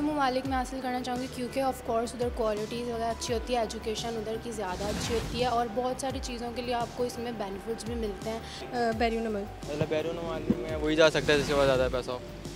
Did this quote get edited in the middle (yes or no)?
no